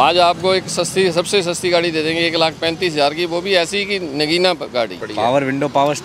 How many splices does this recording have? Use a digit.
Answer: 1